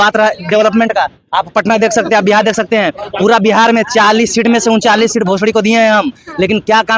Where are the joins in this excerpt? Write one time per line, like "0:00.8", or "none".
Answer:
none